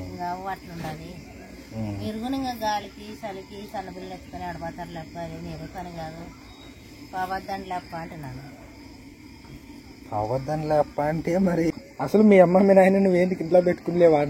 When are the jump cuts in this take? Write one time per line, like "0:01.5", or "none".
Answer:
0:11.5